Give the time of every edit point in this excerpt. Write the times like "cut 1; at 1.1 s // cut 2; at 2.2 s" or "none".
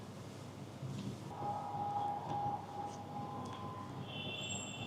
cut 1; at 1.3 s